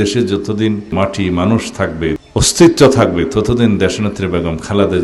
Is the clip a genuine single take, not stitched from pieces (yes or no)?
no